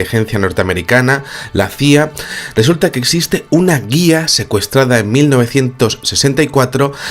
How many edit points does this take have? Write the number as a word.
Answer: one